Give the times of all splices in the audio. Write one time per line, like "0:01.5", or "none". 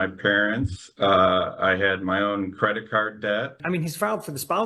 0:03.6